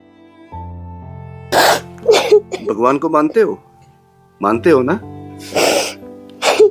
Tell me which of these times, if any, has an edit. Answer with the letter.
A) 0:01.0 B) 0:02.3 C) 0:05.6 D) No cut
A